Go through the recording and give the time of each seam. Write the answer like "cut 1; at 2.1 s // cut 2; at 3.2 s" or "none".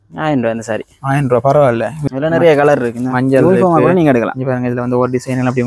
cut 1; at 1.9 s

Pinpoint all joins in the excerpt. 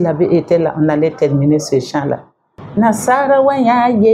cut 1; at 2.5 s

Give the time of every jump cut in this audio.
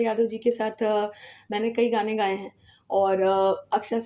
none

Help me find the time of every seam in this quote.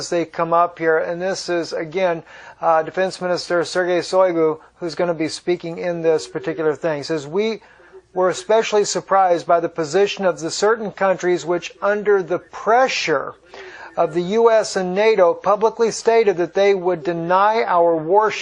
none

